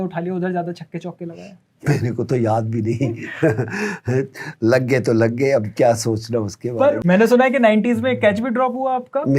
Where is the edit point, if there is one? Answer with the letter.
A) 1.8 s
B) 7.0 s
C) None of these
B